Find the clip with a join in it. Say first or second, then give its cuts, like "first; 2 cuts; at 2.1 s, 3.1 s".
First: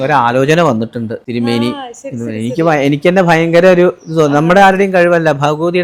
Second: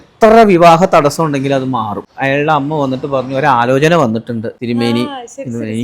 second; 1 cut; at 2.1 s